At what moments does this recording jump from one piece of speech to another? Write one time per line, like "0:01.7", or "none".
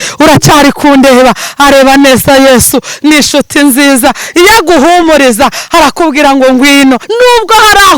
0:07.1